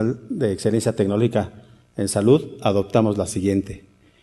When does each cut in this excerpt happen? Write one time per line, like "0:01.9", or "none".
0:02.7